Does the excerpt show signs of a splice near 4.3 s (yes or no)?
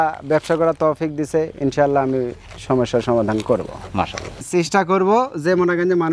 yes